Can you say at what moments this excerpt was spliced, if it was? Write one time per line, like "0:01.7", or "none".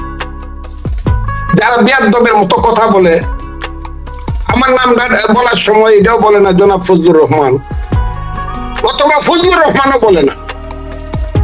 none